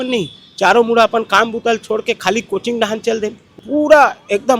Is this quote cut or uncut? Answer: cut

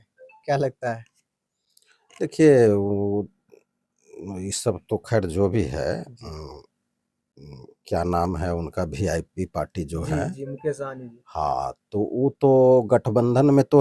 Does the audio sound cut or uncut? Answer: uncut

